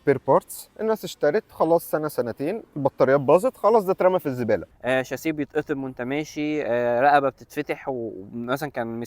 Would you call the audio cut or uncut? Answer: cut